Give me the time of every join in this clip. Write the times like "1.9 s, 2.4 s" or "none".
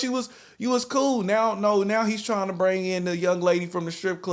none